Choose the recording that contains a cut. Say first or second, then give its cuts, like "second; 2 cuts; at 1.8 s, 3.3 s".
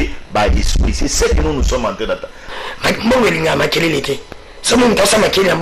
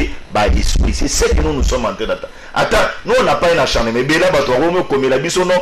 first; 1 cut; at 2.5 s